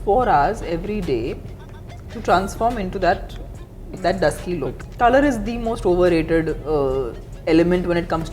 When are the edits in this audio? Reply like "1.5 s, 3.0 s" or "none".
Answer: 4.8 s

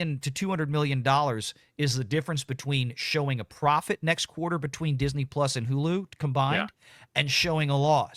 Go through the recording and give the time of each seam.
none

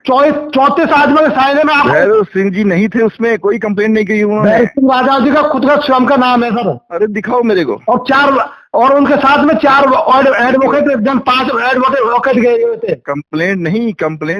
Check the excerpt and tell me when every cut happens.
none

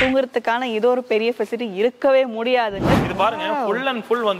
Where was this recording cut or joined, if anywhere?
3.0 s

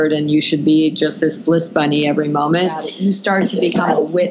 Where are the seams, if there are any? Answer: 2.9 s

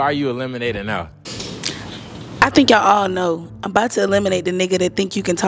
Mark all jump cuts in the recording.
none

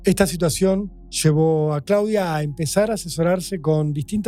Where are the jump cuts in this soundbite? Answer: none

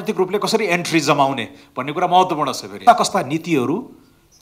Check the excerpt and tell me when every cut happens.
2.7 s

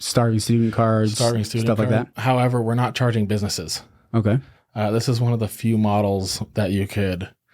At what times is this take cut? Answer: 2.1 s

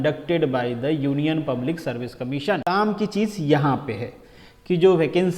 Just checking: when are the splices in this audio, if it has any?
2.6 s

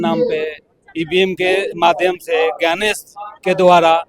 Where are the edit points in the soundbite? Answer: none

